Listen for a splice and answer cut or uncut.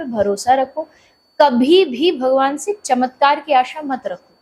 uncut